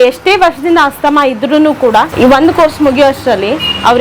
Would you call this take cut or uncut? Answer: cut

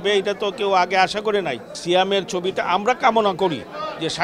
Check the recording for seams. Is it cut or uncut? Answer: cut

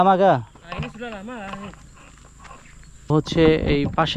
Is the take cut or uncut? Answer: cut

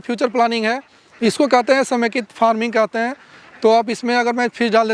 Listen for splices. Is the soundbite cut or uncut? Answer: cut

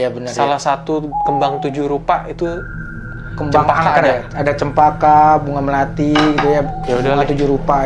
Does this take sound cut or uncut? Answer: uncut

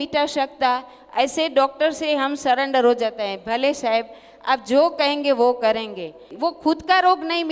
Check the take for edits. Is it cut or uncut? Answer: cut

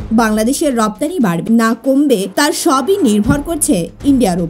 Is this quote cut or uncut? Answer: cut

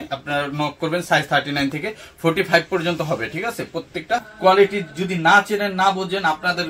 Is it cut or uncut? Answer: cut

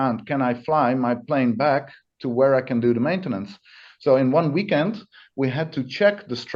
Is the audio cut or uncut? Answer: uncut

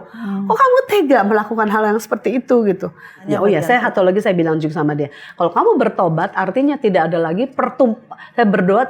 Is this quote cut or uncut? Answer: cut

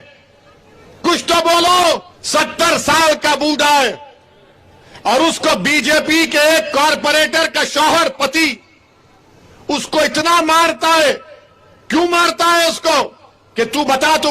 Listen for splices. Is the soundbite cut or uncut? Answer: cut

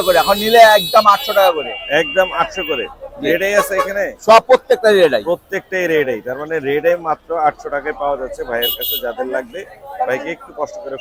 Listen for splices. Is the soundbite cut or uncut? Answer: uncut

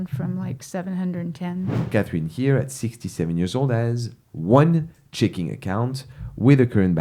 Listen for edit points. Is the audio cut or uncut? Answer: cut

